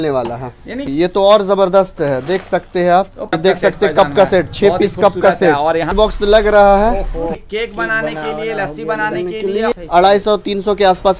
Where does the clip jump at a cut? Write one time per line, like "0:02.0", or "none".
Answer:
0:00.9
0:03.3
0:05.9
0:07.3
0:09.7